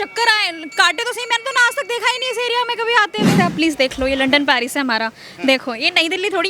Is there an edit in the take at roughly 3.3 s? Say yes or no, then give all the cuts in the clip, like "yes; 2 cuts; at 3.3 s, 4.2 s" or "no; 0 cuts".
yes; 1 cut; at 3.3 s